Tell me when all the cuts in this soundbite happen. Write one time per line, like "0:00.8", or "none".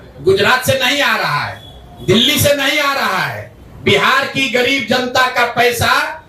none